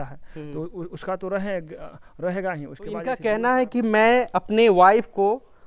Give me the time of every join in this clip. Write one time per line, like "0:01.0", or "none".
0:03.3